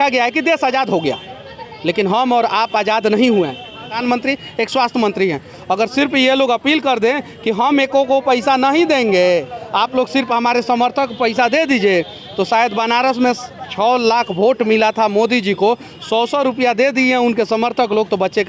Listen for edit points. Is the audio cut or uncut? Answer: cut